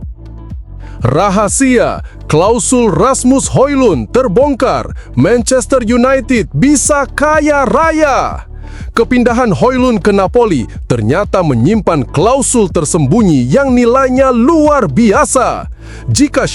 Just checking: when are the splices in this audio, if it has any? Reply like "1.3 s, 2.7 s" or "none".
1.0 s